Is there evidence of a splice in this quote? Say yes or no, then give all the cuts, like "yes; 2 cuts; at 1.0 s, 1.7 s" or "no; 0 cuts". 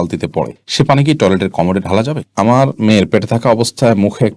yes; 1 cut; at 2.3 s